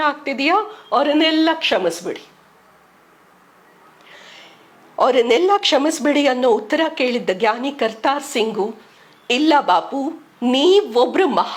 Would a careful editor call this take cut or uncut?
uncut